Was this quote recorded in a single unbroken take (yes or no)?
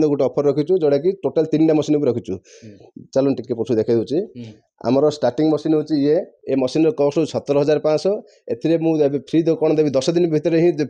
no